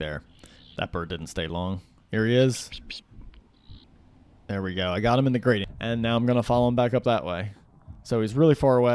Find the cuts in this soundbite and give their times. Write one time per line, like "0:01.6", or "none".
0:05.7

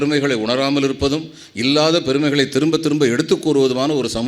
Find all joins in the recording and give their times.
none

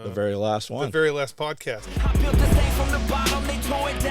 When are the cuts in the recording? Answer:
0:01.9

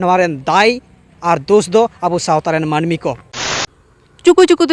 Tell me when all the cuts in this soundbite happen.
0:03.4

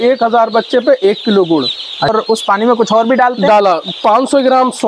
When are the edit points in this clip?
0:02.1

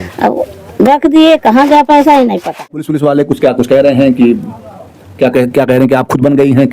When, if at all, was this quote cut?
0:02.9

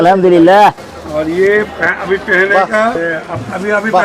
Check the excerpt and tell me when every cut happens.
0:03.0

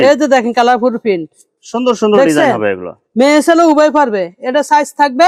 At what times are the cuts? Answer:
none

